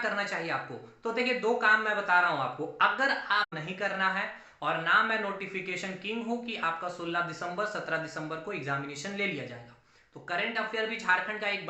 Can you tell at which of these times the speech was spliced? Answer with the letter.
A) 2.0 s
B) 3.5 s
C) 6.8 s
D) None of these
B